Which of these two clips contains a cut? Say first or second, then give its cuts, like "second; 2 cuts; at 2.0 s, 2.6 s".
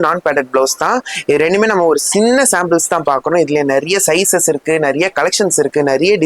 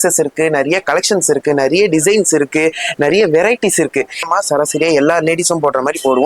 second; 1 cut; at 4.2 s